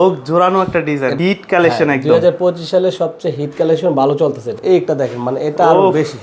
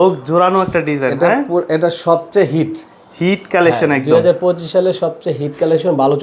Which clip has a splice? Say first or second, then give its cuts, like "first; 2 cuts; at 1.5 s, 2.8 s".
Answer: first; 2 cuts; at 1.1 s, 4.6 s